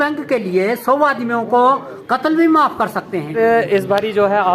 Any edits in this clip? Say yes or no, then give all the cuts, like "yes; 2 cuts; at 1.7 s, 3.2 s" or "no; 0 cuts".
yes; 1 cut; at 3.3 s